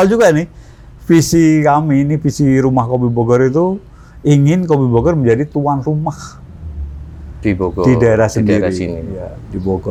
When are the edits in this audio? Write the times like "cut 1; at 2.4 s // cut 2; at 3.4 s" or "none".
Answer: none

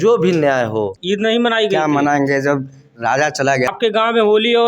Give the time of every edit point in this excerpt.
cut 1; at 1.0 s // cut 2; at 3.7 s

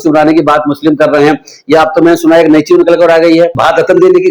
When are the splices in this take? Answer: none

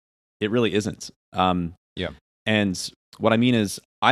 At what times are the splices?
none

